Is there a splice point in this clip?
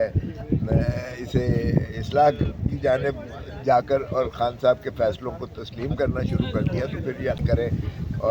yes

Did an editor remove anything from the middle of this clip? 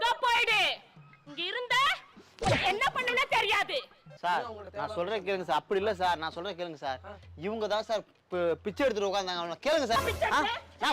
yes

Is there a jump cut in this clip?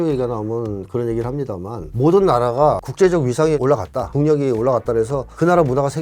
no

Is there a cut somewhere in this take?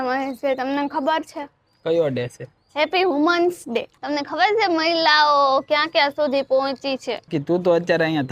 yes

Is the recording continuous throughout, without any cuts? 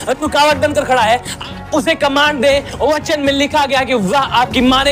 yes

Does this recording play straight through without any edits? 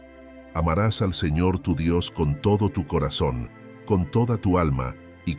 yes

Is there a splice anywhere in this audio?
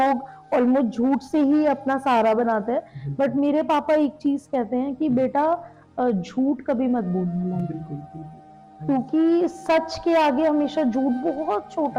no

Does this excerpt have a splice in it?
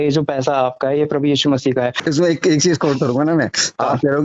yes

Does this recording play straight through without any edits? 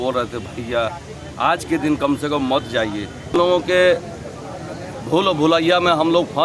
no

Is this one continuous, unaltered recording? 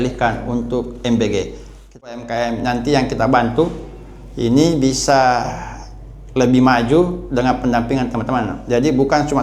no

